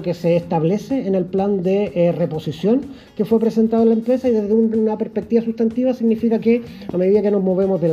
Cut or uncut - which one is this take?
uncut